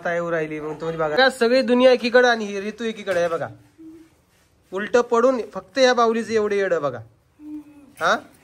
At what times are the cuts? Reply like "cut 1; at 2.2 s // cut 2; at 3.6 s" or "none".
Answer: cut 1; at 1.1 s